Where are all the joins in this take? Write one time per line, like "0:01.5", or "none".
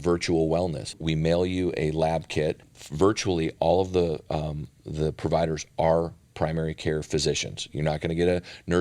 0:01.0
0:02.6